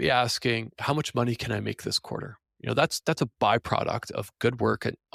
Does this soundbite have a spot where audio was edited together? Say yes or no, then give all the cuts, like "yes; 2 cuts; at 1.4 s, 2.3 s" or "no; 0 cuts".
no; 0 cuts